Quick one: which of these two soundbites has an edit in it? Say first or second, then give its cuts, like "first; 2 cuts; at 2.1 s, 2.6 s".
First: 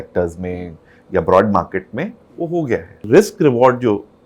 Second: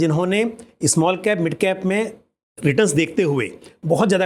first; 1 cut; at 3.0 s